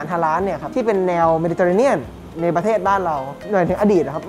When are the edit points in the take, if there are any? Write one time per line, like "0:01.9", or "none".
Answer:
none